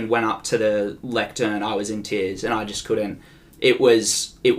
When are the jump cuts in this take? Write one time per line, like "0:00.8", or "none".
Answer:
none